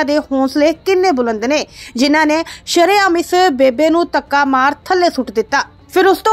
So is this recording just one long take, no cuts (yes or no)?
yes